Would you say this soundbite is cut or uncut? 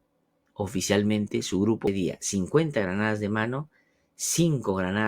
cut